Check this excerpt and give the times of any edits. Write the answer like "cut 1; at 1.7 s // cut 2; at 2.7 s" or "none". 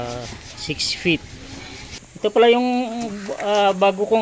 cut 1; at 2.0 s